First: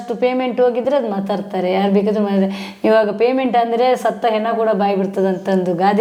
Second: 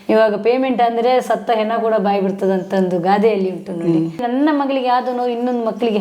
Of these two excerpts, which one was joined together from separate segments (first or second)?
second